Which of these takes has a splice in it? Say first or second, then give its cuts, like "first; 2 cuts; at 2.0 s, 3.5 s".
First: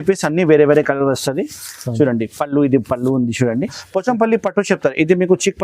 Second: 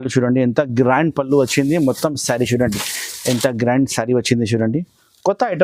first; 1 cut; at 3.8 s